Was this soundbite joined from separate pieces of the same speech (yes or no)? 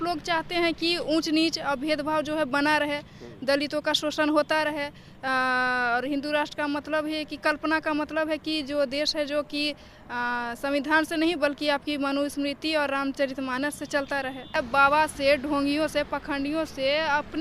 yes